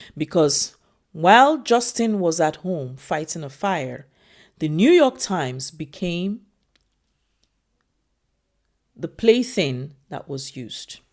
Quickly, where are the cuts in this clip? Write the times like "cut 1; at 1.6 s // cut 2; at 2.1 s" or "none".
none